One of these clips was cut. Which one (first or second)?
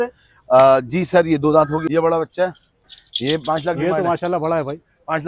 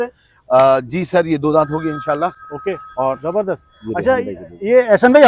first